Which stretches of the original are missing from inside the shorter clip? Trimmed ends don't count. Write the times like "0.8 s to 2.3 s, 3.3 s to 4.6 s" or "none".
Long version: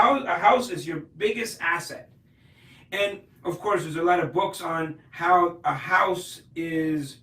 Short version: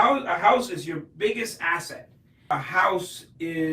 2.4 s to 5.6 s

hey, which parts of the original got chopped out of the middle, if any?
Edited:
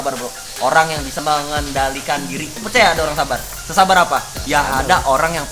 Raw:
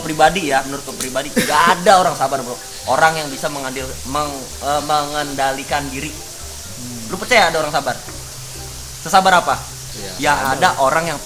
3.4 s to 4.8 s, 6.2 s to 7.1 s, 8.1 s to 8.9 s, 9.7 s to 10.1 s

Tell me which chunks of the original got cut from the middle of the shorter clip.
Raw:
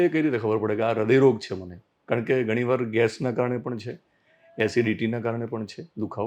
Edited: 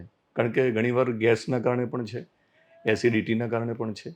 none

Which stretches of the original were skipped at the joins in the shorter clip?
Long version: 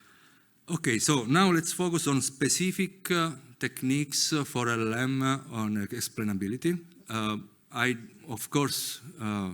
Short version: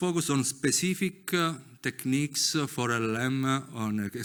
none

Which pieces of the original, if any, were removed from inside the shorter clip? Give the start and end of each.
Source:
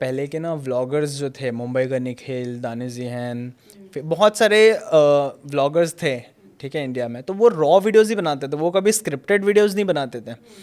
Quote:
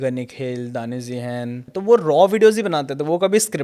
3.6 s to 7.2 s

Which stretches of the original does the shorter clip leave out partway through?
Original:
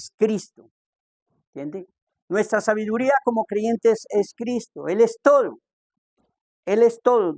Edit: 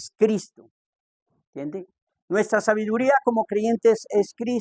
none

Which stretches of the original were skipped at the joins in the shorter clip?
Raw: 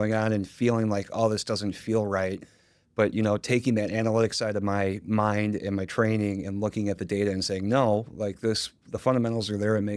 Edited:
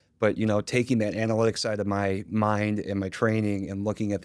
none

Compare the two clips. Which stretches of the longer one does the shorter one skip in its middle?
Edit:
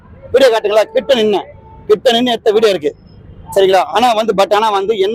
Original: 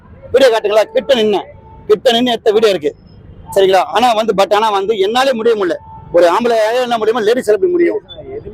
none

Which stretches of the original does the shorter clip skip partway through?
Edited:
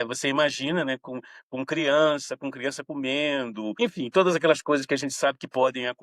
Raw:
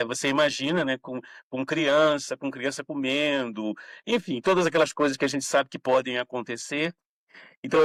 3.7 s to 4.1 s

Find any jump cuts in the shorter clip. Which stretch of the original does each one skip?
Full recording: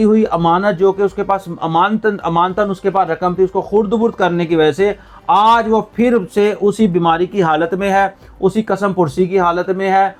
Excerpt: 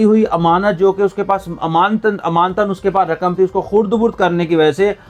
none

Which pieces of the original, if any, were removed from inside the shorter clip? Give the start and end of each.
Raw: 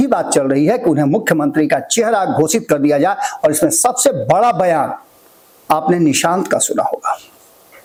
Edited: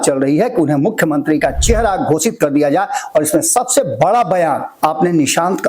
5.0 s to 5.5 s

